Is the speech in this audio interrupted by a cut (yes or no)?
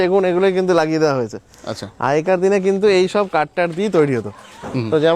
no